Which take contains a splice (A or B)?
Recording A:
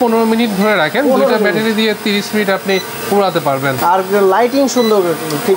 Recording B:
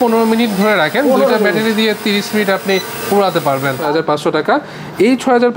B